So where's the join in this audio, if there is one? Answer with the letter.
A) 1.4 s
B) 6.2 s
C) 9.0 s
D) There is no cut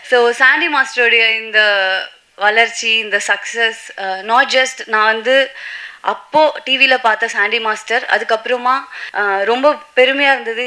C